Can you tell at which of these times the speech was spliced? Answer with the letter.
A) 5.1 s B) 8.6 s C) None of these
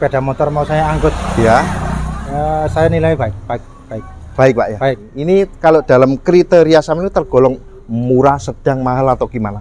A